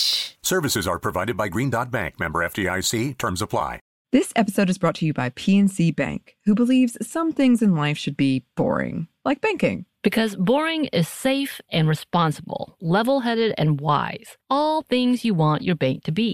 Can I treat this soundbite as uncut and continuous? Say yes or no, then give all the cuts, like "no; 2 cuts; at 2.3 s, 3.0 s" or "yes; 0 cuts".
no; 1 cut; at 3.9 s